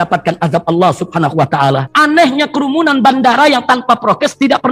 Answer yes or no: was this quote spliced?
yes